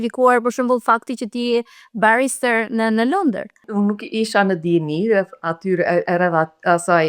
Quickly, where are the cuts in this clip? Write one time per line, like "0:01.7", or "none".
0:03.6